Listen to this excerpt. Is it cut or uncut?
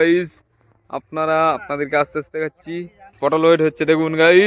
cut